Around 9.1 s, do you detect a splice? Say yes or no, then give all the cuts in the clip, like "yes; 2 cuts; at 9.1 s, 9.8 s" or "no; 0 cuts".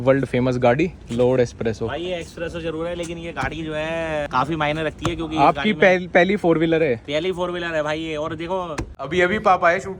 yes; 3 cuts; at 1.0 s, 4.3 s, 9.1 s